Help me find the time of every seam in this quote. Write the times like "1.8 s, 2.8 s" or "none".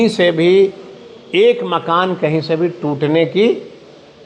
none